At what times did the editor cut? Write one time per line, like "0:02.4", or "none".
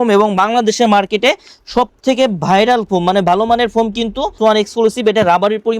0:04.3

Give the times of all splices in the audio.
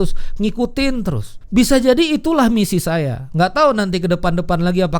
0:01.3

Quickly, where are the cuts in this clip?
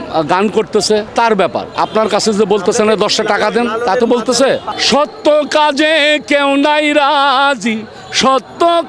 0:04.7

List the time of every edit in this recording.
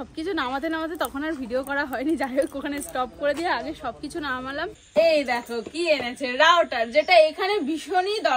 0:04.8

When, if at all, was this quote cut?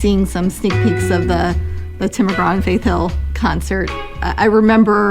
0:04.2

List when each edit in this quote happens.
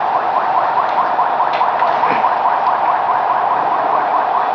none

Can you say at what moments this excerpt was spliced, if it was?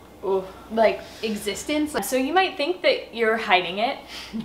0:02.0

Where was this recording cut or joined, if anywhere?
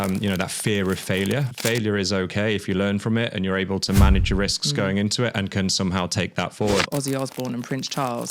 0:01.5
0:06.9

